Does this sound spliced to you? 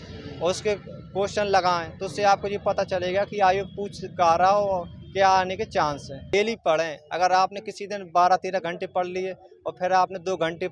yes; 1 cut; at 6.3 s

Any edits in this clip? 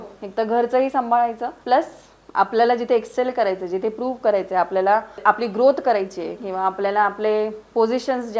yes; 2 cuts; at 1.5 s, 5.2 s

